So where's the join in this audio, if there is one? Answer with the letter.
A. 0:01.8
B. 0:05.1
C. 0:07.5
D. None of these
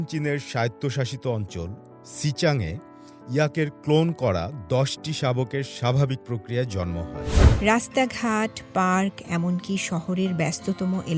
C